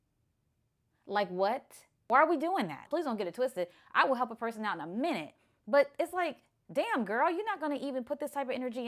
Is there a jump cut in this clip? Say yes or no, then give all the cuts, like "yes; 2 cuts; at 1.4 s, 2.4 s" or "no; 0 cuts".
yes; 1 cut; at 2.8 s